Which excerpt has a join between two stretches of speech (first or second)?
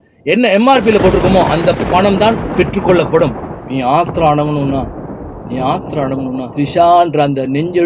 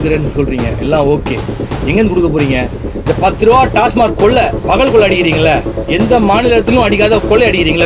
first